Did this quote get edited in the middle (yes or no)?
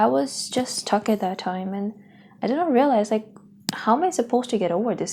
no